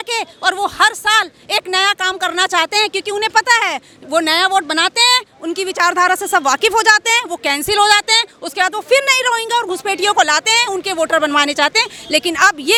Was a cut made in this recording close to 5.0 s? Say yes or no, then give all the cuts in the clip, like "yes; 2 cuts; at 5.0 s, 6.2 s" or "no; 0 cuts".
no; 0 cuts